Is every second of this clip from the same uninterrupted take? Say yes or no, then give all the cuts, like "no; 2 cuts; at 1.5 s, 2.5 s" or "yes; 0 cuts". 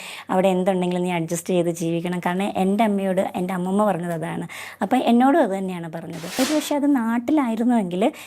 no; 1 cut; at 6.2 s